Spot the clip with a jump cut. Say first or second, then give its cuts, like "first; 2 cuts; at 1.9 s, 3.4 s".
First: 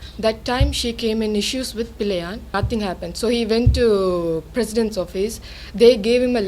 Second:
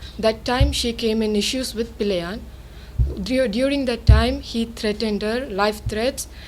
first; 1 cut; at 2.5 s